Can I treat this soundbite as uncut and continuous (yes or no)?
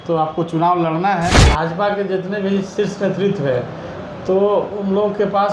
no